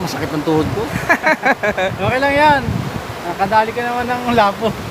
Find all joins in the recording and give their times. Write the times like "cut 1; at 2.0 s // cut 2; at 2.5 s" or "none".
none